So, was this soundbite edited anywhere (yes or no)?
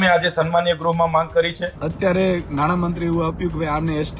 yes